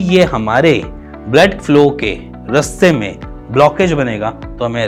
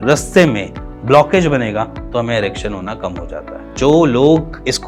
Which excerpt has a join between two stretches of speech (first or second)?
second